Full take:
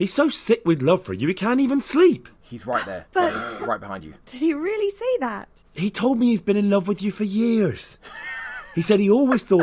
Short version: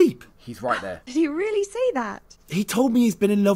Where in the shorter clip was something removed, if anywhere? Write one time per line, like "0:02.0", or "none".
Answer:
0:00.9